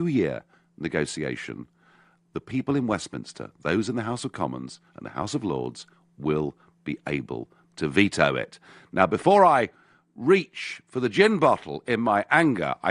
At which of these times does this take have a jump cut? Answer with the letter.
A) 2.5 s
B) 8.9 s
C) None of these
B